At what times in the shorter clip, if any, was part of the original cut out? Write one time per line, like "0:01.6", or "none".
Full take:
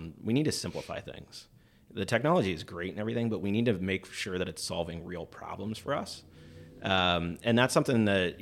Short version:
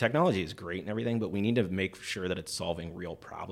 none